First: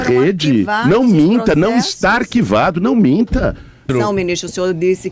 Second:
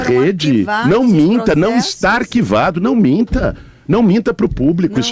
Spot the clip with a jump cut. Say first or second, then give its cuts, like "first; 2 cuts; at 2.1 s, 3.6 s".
first; 1 cut; at 3.8 s